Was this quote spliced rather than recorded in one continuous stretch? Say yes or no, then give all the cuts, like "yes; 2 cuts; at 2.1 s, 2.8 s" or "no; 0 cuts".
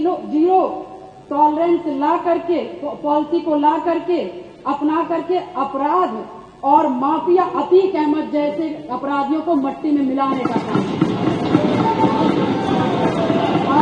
no; 0 cuts